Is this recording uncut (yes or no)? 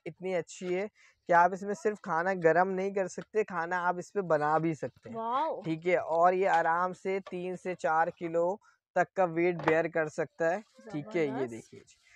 yes